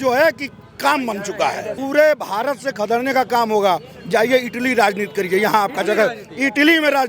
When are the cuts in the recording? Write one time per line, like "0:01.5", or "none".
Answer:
0:01.7